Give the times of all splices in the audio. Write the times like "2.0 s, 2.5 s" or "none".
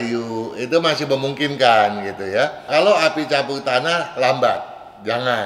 2.7 s

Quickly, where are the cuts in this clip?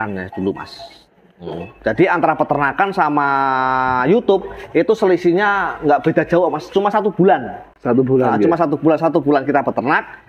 none

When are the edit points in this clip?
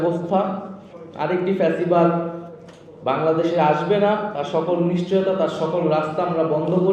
none

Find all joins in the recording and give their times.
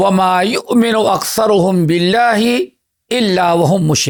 none

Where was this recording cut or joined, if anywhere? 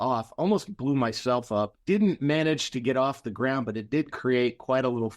1.8 s

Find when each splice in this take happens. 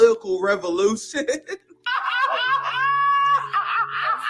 none

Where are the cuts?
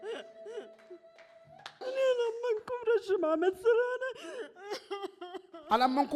1.9 s

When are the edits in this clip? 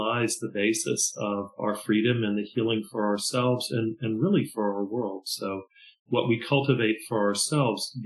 1.6 s

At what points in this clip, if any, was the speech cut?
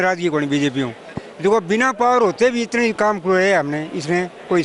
1.1 s

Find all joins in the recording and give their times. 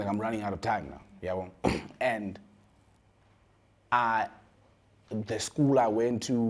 none

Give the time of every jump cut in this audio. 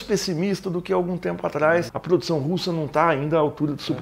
1.9 s

